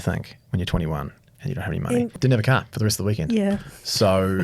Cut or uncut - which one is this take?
cut